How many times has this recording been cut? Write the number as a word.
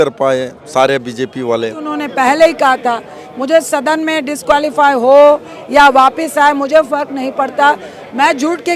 one